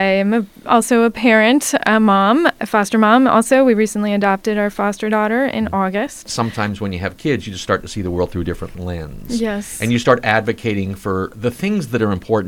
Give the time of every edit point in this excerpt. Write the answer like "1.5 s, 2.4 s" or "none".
2.6 s, 6.3 s, 8.8 s, 11.3 s